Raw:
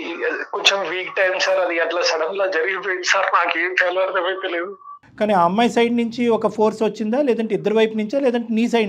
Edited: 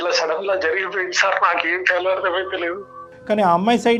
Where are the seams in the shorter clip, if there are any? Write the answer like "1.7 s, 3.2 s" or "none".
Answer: none